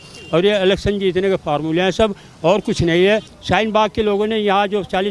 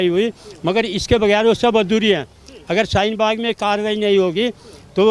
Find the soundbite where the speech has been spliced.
first; 1 cut; at 3.3 s

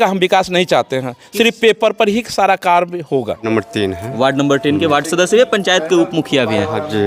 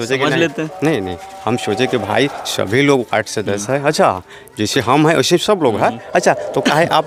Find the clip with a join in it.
first; 1 cut; at 3.4 s

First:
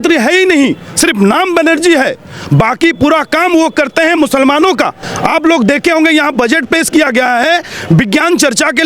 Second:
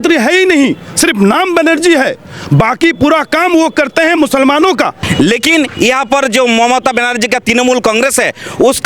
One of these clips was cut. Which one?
second; 1 cut; at 5.0 s

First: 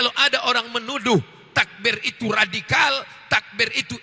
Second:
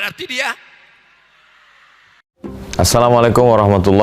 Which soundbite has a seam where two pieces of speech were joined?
second; 1 cut; at 2.2 s

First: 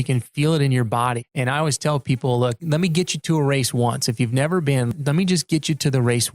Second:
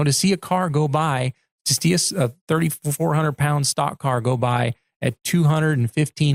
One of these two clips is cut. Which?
first; 3 cuts; at 1.2 s, 2.6 s, 4.9 s

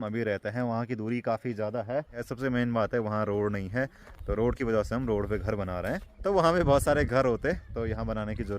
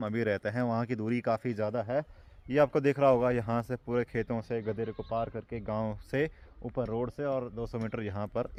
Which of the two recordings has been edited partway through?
first; 2 cuts; at 2.2 s, 6.1 s

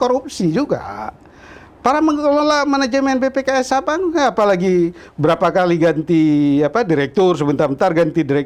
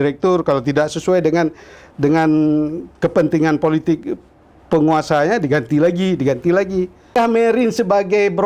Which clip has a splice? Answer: second; 1 cut; at 7.2 s

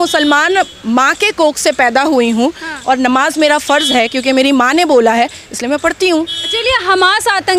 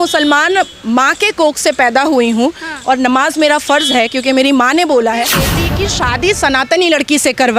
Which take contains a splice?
second; 1 cut; at 5.6 s

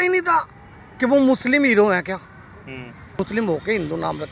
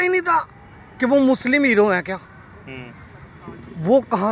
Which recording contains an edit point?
first; 1 cut; at 3.2 s

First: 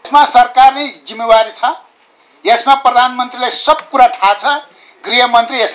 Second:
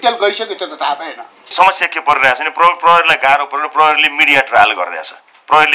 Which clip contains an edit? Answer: second; 1 cut; at 1.5 s

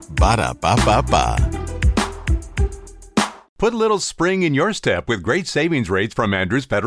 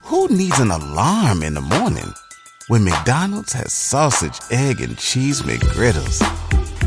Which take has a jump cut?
first; 1 cut; at 3.4 s

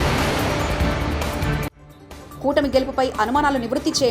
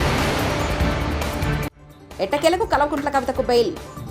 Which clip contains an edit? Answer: second; 1 cut; at 1.6 s

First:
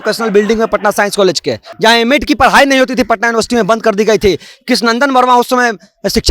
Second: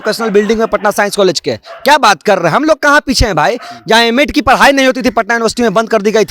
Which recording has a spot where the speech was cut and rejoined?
first; 1 cut; at 1.7 s

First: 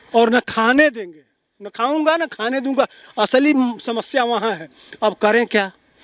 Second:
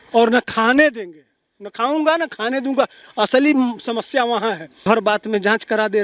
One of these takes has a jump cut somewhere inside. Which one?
second; 1 cut; at 4.7 s

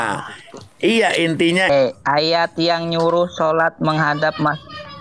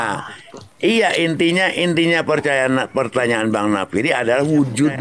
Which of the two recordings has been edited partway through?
first; 1 cut; at 1.7 s

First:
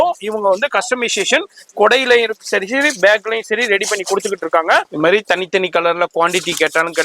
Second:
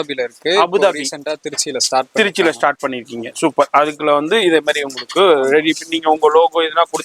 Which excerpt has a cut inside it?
first; 1 cut; at 4.9 s

